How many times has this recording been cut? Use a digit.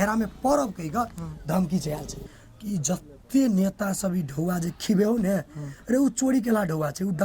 1